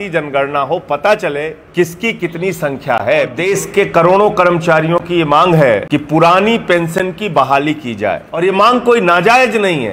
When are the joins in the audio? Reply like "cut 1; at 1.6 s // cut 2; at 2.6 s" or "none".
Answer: cut 1; at 1.6 s // cut 2; at 3.4 s // cut 3; at 5.8 s // cut 4; at 8.3 s